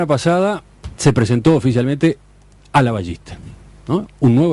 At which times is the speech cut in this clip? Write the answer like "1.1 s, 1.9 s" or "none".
none